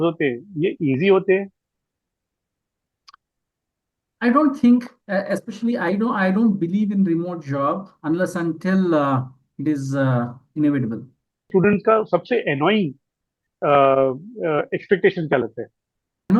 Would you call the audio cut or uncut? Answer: cut